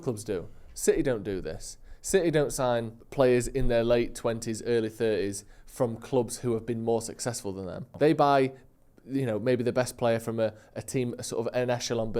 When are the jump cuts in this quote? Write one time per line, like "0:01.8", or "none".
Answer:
0:03.0
0:07.8